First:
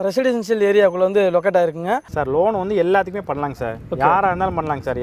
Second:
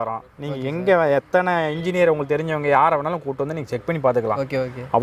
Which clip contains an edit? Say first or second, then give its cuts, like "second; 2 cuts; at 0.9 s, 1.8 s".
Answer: first; 1 cut; at 2.1 s